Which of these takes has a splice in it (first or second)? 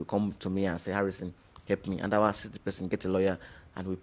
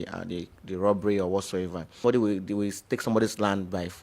second